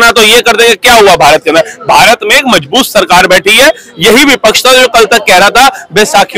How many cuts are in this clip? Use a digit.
0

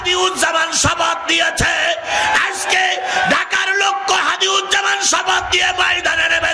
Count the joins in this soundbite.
0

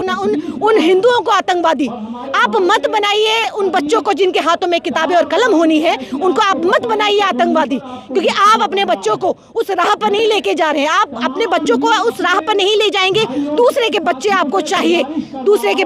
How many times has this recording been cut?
0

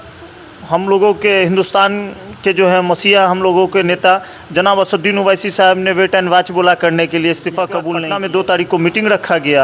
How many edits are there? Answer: 1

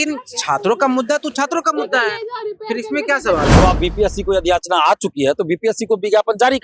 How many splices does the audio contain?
1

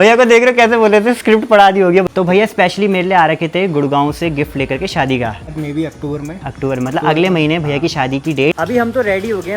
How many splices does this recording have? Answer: 3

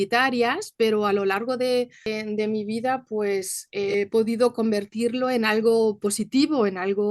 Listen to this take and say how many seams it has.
2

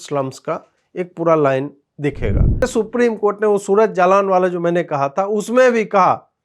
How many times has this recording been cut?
1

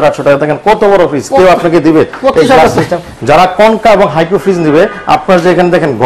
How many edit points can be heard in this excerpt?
1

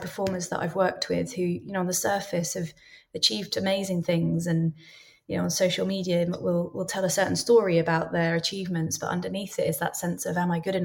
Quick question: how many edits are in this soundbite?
0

